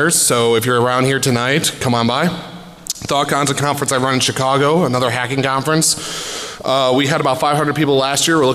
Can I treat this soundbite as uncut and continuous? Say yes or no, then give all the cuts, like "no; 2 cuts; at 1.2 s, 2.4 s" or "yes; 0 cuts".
yes; 0 cuts